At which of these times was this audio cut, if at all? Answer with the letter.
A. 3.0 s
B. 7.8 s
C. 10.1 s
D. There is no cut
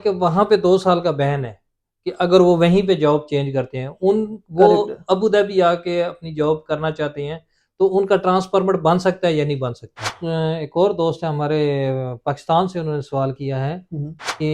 C